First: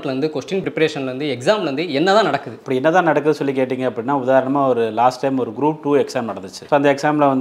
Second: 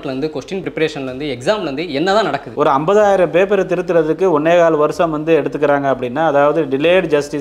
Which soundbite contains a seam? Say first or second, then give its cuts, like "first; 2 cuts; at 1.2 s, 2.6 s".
second; 1 cut; at 2.5 s